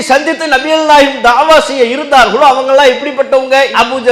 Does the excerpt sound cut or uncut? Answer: uncut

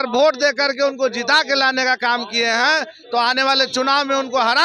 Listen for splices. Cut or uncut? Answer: uncut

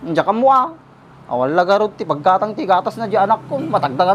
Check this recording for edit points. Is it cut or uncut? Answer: uncut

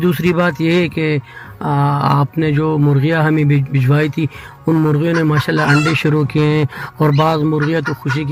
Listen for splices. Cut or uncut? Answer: uncut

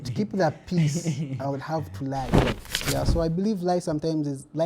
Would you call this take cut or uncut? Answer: cut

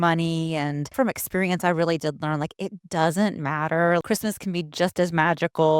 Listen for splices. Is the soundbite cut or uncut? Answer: cut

